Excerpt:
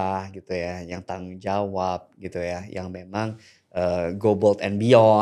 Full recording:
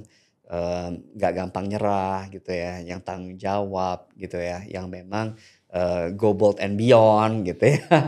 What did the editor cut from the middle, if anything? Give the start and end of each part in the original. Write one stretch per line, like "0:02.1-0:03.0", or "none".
none